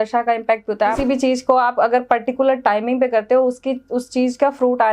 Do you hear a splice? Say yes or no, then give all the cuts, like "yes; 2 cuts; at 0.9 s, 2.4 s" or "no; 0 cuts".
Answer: yes; 1 cut; at 1.0 s